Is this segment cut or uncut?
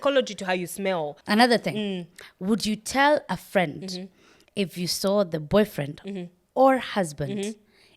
cut